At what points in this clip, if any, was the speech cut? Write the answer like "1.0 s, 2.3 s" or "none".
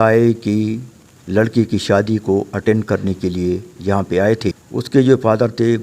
4.7 s